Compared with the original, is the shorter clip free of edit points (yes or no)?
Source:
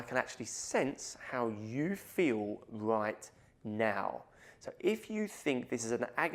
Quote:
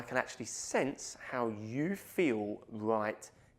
yes